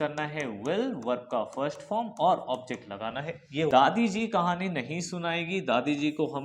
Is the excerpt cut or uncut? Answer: cut